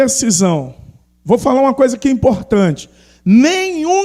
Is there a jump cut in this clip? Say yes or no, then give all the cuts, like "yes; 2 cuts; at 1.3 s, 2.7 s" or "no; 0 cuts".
no; 0 cuts